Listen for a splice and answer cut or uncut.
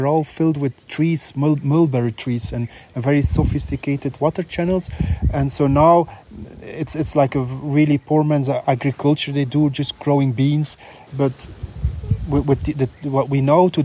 cut